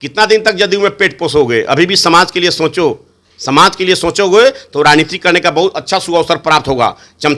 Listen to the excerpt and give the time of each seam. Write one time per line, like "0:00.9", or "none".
none